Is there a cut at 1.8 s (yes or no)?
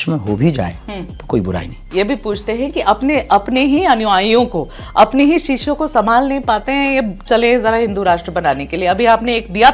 yes